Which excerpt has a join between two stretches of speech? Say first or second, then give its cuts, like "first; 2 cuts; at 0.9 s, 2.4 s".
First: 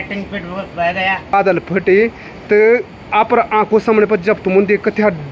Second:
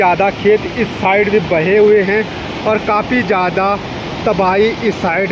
first; 1 cut; at 1.3 s